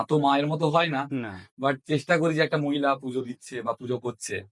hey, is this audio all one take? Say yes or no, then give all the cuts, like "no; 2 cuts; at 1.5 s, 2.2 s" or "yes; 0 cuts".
yes; 0 cuts